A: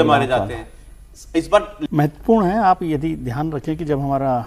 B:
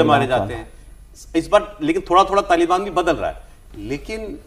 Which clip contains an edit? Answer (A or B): A